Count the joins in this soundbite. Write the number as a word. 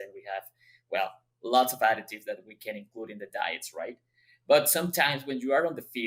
zero